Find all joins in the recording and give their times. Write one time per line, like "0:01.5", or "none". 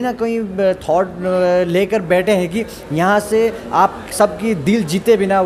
none